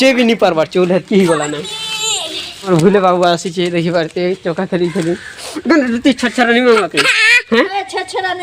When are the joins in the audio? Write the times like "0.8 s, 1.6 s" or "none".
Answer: 2.7 s